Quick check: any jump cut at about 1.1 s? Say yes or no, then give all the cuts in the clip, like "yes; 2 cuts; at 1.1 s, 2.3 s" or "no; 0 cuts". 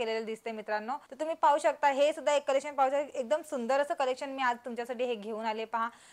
yes; 1 cut; at 1.1 s